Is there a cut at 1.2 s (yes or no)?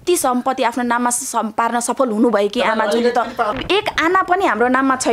no